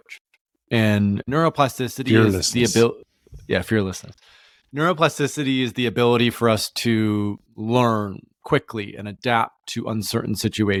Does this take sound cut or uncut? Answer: uncut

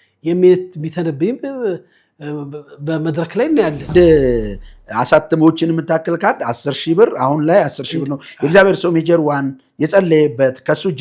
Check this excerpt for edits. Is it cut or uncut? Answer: cut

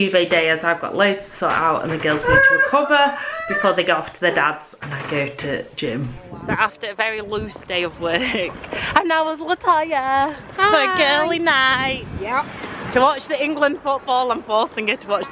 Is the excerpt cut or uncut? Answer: cut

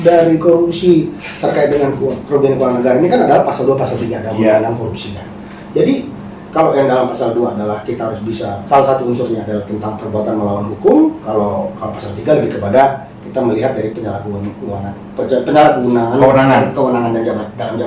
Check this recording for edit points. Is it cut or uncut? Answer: cut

